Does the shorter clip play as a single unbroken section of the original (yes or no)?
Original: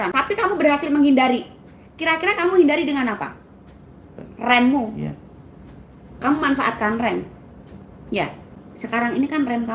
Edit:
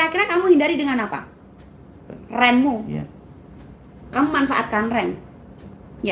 yes